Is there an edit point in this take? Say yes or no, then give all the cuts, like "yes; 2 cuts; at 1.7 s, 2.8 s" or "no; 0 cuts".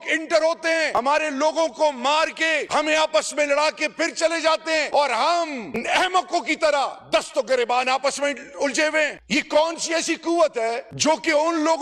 yes; 4 cuts; at 1.0 s, 2.6 s, 4.9 s, 9.2 s